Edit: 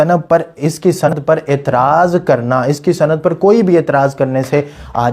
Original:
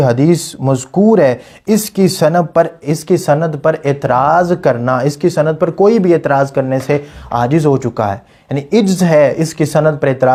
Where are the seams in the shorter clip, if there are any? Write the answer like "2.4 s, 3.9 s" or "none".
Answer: 1.1 s